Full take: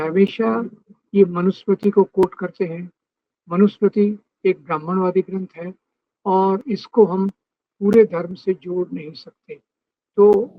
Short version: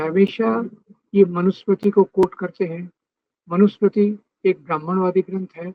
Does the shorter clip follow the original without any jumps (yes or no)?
yes